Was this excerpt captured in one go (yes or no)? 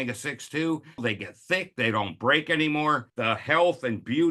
no